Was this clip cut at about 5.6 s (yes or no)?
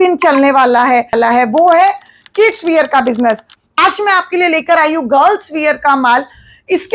no